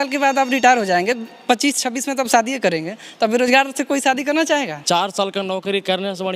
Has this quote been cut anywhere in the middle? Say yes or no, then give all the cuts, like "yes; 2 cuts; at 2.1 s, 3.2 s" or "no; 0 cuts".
yes; 1 cut; at 4.8 s